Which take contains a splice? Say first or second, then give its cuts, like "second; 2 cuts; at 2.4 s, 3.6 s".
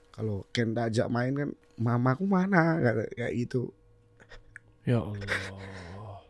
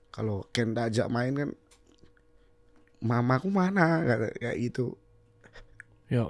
first; 1 cut; at 1.7 s